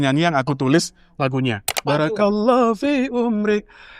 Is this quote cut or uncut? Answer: cut